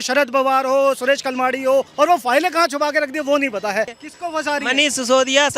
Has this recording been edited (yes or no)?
yes